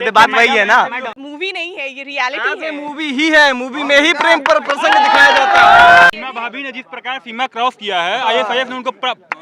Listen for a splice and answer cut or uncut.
cut